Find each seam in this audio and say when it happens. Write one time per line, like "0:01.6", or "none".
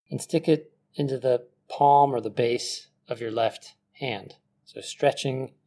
none